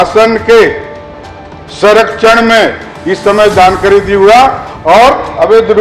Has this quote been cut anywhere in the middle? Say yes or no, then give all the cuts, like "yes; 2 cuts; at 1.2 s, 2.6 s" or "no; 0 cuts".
no; 0 cuts